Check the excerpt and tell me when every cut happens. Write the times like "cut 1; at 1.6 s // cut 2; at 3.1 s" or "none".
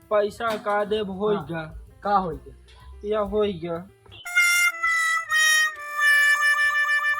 cut 1; at 4.1 s